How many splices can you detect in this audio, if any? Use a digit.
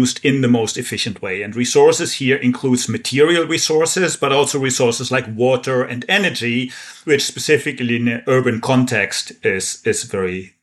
0